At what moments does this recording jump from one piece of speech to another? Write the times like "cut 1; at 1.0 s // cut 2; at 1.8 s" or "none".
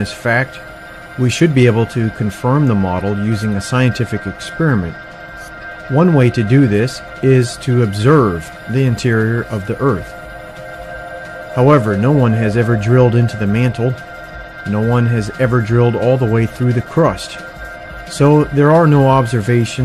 cut 1; at 9.0 s